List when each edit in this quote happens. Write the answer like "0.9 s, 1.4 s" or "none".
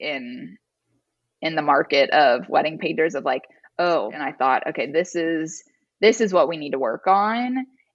4.2 s